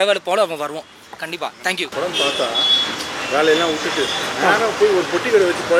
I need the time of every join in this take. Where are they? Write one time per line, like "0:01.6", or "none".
0:01.9